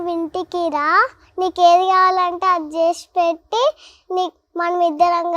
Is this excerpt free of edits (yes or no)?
yes